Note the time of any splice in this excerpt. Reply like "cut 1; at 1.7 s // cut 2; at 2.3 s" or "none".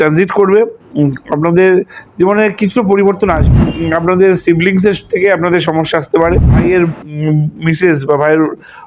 cut 1; at 3.5 s // cut 2; at 6.5 s

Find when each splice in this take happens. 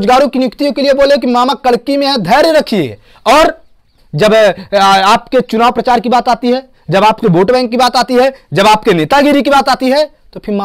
none

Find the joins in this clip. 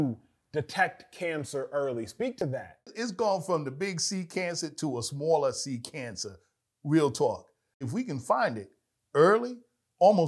cut 1; at 2.4 s // cut 2; at 7.6 s

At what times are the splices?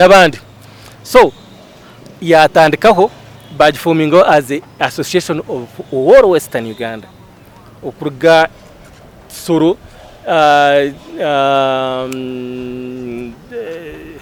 none

